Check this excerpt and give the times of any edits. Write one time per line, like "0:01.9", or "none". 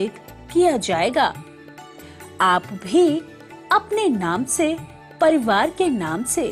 none